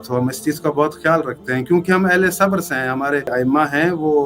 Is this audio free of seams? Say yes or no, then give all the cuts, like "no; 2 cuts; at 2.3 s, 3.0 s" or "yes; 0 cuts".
no; 1 cut; at 3.3 s